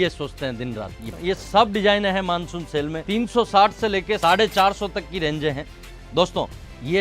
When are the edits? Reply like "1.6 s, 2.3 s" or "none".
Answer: 1.1 s, 3.0 s, 4.2 s